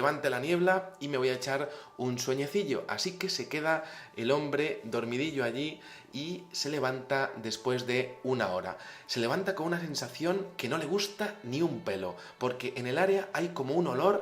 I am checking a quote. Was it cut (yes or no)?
no